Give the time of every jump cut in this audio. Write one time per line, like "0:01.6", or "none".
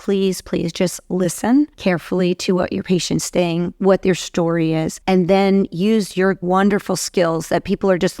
0:01.7
0:04.9
0:06.4